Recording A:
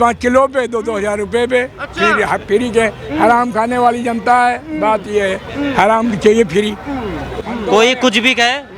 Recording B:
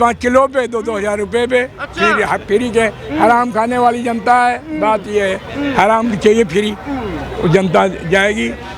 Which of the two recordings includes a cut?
A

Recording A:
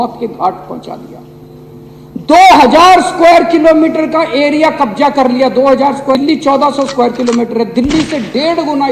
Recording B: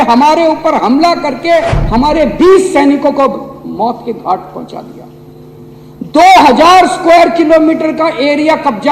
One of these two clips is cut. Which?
A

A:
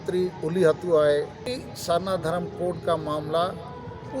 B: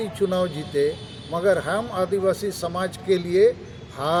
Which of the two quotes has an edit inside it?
A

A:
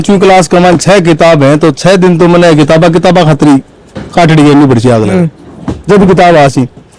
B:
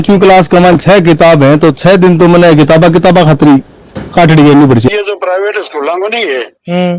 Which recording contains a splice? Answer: B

